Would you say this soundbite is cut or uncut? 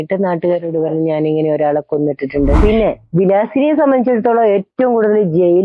cut